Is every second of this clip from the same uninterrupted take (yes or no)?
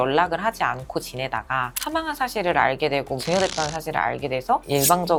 yes